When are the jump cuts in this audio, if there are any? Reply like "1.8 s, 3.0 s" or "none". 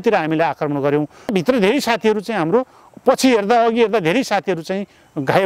1.3 s